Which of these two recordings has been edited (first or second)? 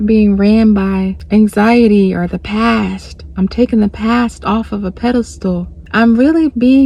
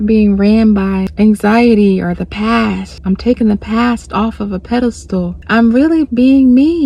second